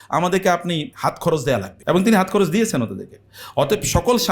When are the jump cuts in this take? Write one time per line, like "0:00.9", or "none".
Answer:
0:00.9
0:01.7